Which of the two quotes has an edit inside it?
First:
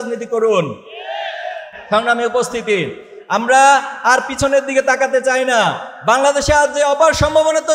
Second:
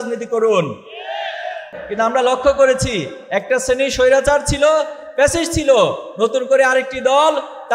second; 1 cut; at 1.7 s

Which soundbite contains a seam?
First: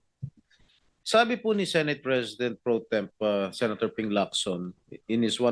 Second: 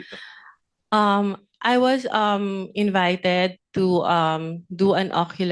first; 1 cut; at 1.0 s

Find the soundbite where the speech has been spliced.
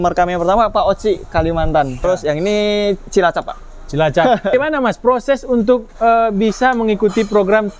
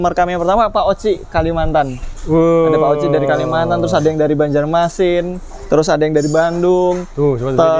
first; 2 cuts; at 2.0 s, 4.5 s

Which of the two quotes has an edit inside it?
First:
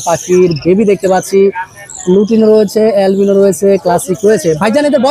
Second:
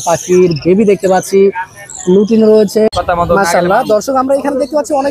second; 1 cut; at 2.9 s

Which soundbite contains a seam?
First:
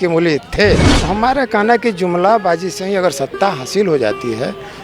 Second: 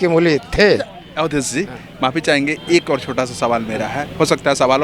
first; 1 cut; at 0.9 s

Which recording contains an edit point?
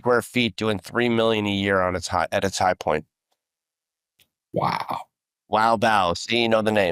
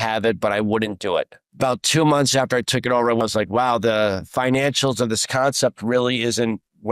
second; 2 cuts; at 1.4 s, 3.2 s

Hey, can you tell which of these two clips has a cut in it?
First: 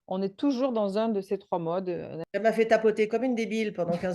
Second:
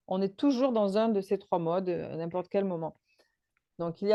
first; 1 cut; at 2.4 s

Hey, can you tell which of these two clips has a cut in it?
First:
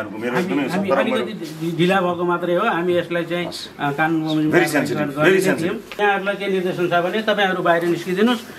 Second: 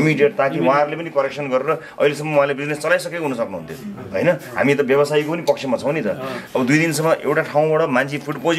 first; 1 cut; at 6.0 s

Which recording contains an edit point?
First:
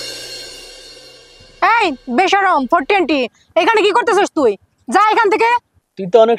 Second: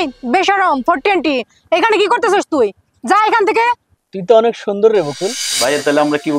second; 1 cut; at 5.5 s

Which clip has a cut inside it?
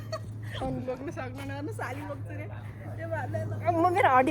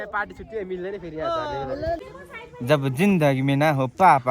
second; 1 cut; at 2.1 s

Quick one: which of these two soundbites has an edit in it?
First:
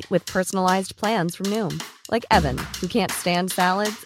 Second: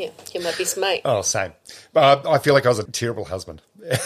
second; 1 cut; at 2.9 s

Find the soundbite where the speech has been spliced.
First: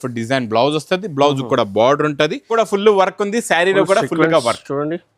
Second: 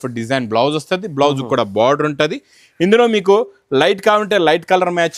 first; 1 cut; at 2.5 s

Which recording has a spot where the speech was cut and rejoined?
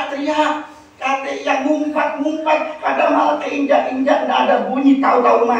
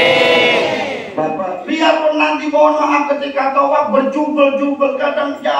second; 1 cut; at 1.4 s

